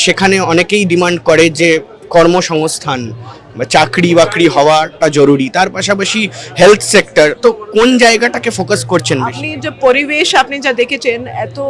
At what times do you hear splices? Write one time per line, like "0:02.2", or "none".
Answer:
none

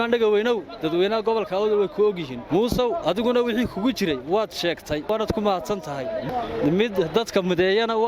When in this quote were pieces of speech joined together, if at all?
0:02.3
0:05.1
0:06.3

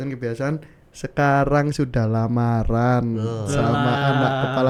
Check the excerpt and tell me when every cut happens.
none

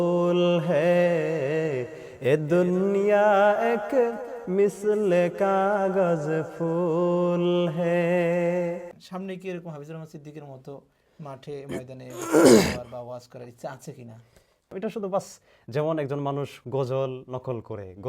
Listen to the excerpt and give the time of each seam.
0:09.0
0:14.7

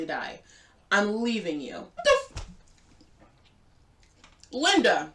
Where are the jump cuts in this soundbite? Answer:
0:02.0

